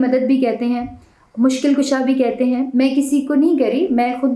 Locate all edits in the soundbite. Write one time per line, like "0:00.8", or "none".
none